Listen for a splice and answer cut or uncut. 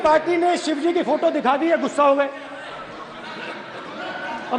uncut